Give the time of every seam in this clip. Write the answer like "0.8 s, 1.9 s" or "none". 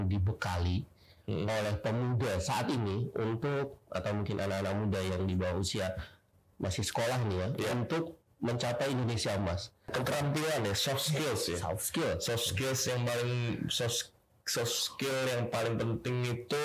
9.9 s